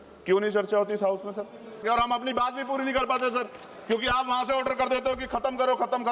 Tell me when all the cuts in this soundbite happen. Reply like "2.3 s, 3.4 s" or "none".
1.8 s